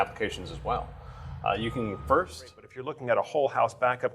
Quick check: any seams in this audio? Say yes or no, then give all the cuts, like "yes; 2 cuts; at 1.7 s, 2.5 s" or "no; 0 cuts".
yes; 1 cut; at 2.7 s